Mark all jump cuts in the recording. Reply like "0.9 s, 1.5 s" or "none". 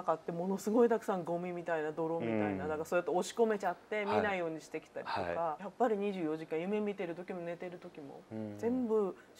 5.6 s